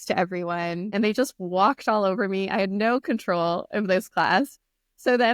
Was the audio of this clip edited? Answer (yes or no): no